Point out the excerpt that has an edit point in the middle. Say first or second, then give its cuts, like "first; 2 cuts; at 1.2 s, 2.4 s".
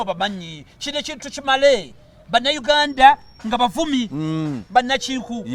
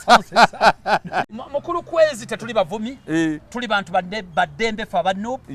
second; 1 cut; at 1.3 s